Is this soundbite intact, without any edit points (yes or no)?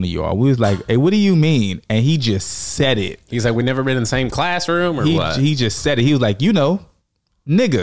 yes